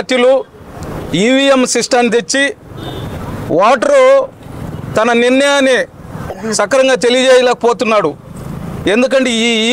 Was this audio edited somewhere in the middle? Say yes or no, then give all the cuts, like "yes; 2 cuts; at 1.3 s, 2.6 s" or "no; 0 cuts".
no; 0 cuts